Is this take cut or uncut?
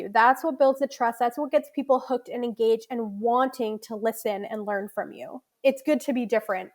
cut